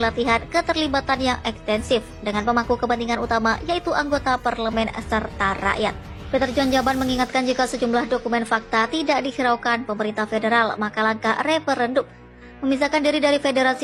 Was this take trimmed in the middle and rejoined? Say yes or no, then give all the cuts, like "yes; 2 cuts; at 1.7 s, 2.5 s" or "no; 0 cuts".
no; 0 cuts